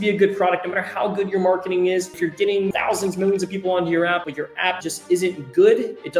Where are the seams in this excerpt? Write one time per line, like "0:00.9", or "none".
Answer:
0:02.7
0:04.6

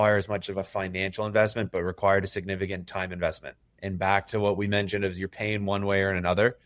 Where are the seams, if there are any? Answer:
none

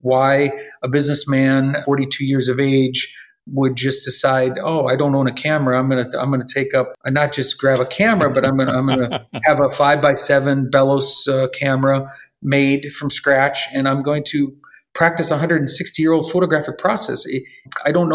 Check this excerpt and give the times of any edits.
0:01.8
0:06.9

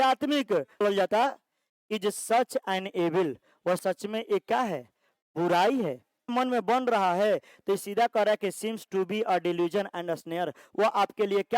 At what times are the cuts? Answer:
0:00.8
0:06.3

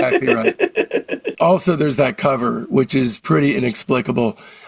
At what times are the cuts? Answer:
0:01.2

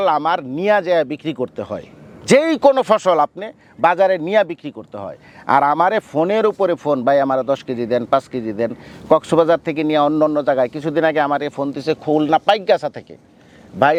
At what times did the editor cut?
none

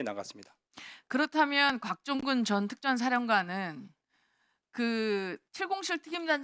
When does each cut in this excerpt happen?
none

